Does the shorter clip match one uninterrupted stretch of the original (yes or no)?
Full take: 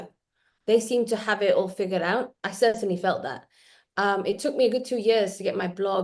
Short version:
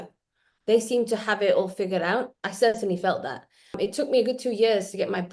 no